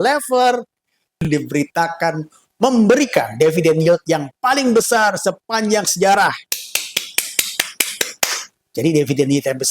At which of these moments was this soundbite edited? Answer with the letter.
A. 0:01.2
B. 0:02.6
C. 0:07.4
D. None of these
A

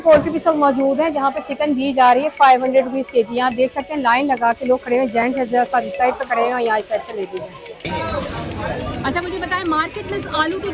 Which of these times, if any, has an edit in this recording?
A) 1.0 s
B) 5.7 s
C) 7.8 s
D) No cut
C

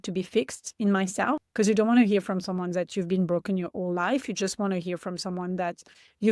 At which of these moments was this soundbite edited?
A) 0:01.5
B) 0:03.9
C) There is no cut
A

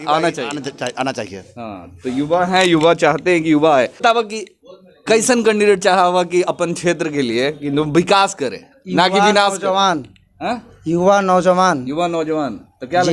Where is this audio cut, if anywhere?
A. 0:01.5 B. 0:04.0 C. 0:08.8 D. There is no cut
B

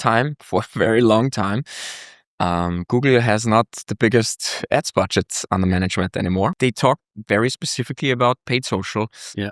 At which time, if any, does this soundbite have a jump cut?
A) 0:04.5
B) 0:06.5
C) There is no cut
B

